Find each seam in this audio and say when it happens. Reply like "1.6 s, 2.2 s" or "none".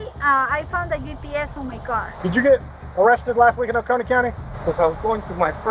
2.2 s, 4.5 s